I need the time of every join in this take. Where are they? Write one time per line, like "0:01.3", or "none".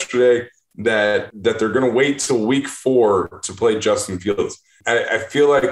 0:01.3
0:04.7